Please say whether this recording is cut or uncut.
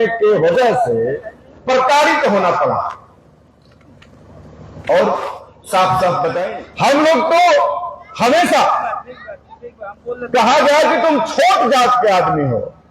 cut